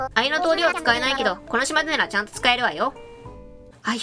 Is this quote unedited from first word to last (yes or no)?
yes